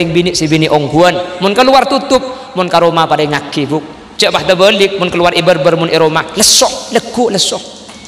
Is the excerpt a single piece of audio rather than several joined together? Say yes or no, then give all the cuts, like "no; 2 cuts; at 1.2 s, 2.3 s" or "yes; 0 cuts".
yes; 0 cuts